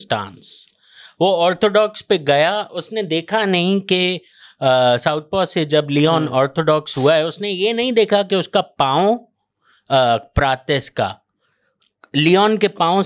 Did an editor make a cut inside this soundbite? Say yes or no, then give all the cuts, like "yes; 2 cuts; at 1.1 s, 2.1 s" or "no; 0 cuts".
no; 0 cuts